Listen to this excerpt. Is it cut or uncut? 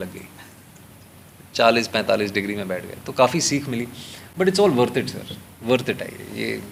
uncut